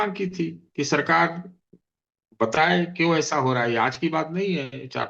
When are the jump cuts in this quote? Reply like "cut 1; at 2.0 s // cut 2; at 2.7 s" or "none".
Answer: none